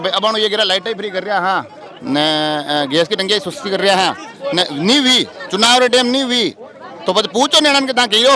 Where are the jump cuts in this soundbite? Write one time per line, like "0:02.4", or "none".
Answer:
none

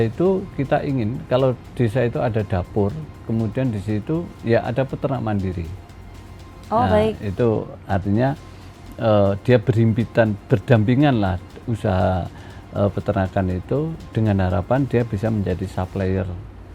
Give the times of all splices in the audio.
none

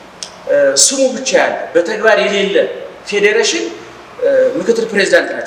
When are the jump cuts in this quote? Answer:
none

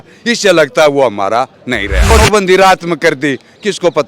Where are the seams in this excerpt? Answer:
0:02.1

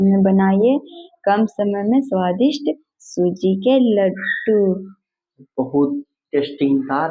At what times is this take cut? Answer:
none

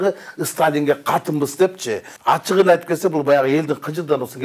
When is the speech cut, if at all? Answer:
0:02.0

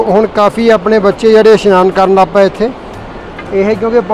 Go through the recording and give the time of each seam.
none

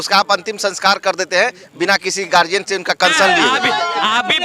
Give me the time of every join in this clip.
0:03.3

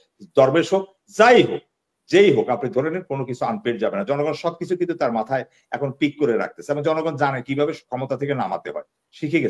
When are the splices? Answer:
none

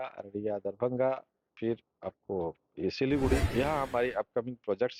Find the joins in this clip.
none

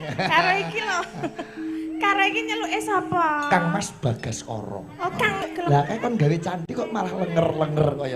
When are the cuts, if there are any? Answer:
0:05.4

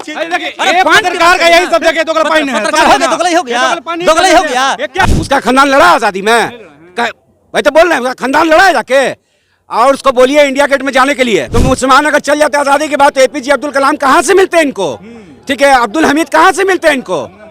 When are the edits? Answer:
0:05.1
0:11.5

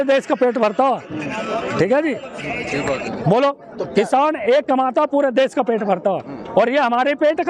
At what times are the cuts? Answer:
none

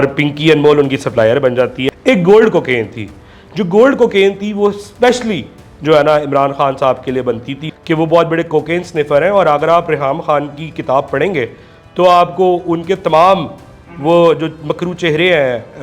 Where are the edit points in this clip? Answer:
0:01.8
0:07.6

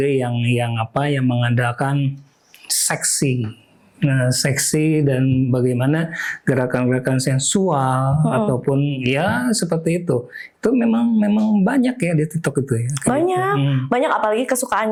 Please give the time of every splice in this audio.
none

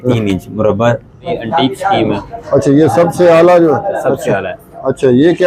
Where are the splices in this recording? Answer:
0:01.3

